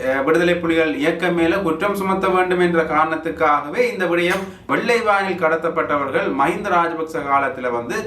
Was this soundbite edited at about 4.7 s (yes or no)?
yes